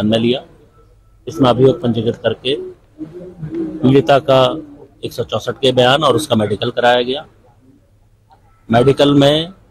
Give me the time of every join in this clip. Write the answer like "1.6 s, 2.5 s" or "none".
none